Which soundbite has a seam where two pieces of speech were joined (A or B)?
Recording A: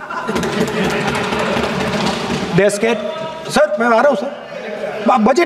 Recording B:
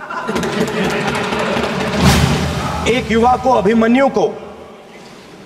B